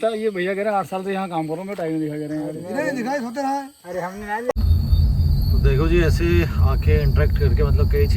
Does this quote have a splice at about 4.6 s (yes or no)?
yes